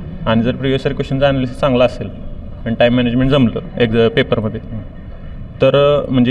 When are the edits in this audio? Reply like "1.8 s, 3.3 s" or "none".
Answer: none